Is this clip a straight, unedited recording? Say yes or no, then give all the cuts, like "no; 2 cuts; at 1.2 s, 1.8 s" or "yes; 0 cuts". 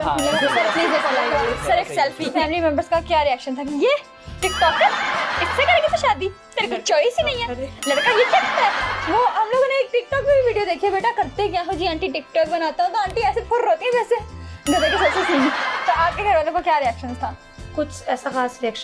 no; 1 cut; at 2.4 s